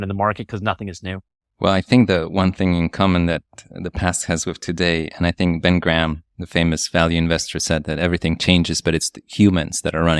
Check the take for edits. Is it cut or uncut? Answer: uncut